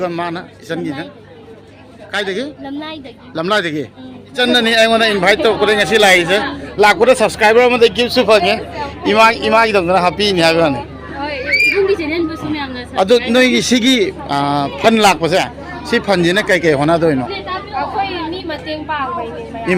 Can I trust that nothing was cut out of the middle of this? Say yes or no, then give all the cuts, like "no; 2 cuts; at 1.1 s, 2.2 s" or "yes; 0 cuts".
no; 1 cut; at 4.3 s